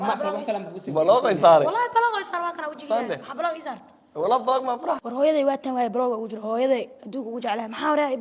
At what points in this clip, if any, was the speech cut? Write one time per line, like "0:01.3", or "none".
0:05.0